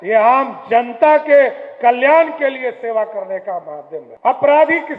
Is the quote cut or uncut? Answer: cut